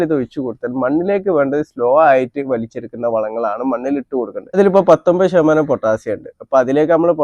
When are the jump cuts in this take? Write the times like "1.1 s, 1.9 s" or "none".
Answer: 4.5 s